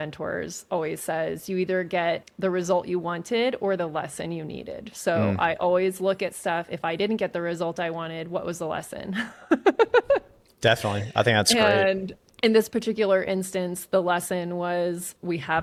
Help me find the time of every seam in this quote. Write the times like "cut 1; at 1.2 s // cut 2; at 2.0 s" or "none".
none